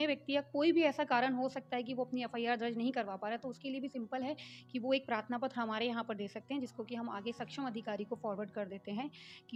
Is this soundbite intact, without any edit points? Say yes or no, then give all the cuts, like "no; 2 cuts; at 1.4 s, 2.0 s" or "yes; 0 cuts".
yes; 0 cuts